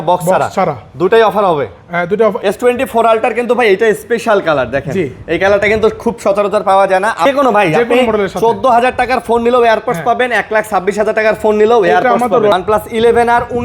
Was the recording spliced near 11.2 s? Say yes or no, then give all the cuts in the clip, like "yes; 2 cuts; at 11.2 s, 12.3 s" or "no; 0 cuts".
no; 3 cuts; at 2.4 s, 7.2 s, 12.5 s